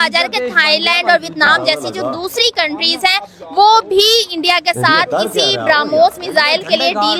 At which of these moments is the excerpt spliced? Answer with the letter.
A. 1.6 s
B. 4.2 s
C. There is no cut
C